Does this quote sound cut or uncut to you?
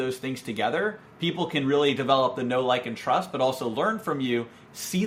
uncut